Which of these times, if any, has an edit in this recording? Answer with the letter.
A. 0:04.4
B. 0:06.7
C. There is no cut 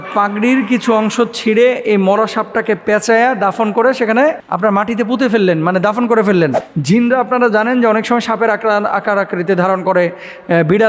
B